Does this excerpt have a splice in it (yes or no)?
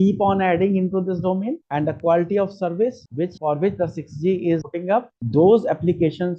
no